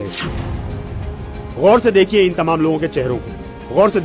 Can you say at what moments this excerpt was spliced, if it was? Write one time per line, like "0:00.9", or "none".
0:02.8

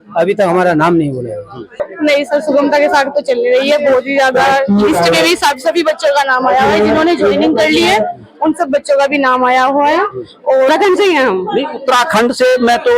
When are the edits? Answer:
0:01.8
0:10.7

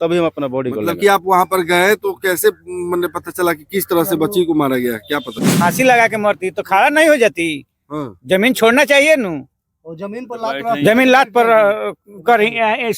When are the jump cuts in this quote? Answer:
0:05.5

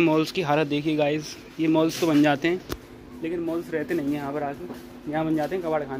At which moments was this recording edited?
none

